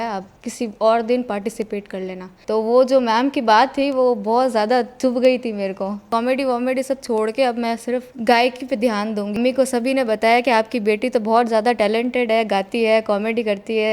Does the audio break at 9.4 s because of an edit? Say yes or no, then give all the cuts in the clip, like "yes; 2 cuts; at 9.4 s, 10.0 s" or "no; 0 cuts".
yes; 2 cuts; at 6.1 s, 9.4 s